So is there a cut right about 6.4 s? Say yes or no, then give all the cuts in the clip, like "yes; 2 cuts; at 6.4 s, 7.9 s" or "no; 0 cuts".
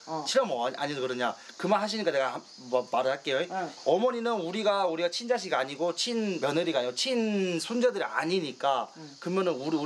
yes; 1 cut; at 6.4 s